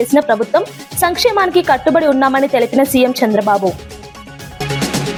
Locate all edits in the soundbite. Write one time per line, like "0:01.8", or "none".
none